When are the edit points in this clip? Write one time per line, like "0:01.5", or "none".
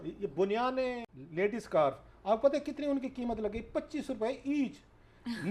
0:01.0